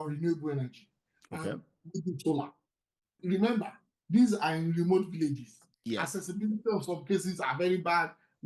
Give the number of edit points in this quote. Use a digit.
1